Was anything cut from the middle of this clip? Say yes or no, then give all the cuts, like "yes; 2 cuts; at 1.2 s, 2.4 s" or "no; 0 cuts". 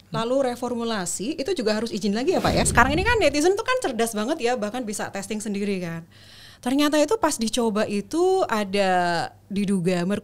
yes; 1 cut; at 2.7 s